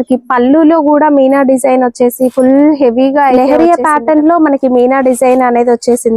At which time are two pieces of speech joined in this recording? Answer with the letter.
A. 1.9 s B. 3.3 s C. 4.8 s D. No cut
B